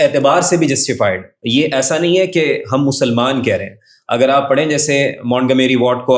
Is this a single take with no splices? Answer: no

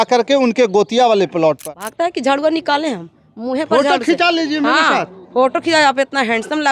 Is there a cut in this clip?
yes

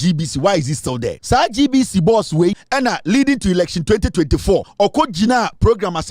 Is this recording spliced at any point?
yes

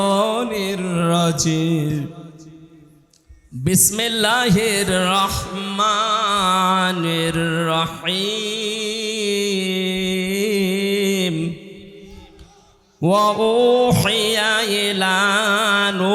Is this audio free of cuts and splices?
yes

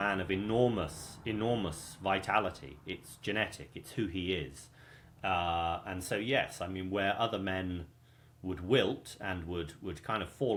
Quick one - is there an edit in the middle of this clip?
no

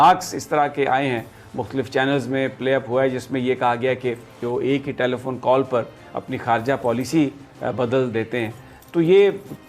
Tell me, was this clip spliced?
yes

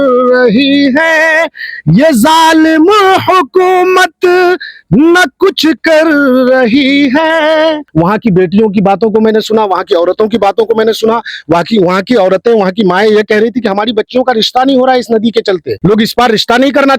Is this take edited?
yes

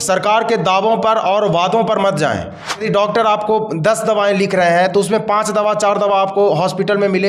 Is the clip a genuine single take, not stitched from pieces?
no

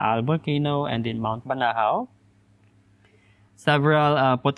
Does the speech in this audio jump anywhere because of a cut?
no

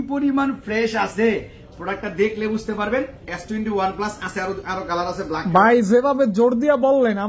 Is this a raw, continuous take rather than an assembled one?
yes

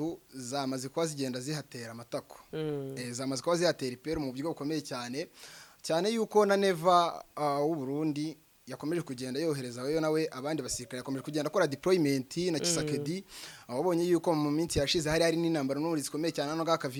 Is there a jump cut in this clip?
no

